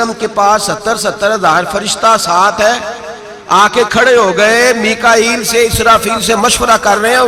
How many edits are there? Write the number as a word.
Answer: zero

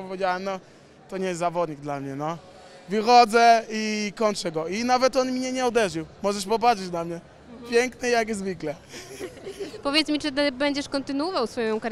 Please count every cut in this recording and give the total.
zero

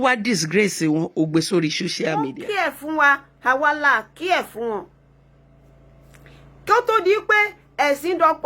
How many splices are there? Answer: one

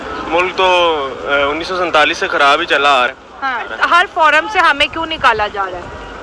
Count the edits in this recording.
one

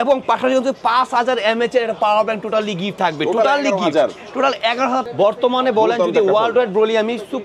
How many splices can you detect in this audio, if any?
one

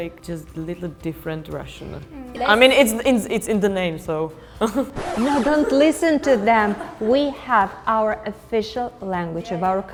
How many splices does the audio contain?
zero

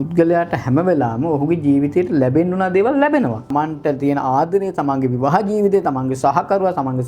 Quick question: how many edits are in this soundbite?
one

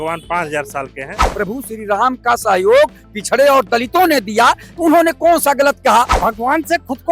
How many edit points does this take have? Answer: two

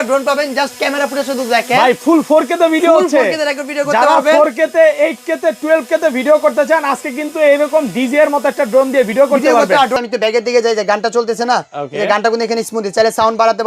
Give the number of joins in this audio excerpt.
one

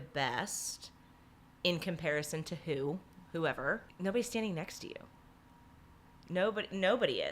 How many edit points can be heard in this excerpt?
one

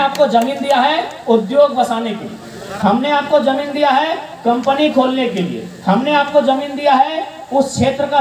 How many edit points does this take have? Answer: zero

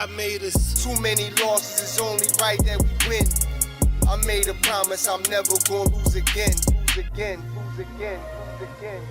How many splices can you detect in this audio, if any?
zero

